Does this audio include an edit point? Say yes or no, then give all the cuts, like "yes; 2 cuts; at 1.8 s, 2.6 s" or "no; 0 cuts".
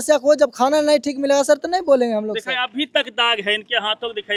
no; 0 cuts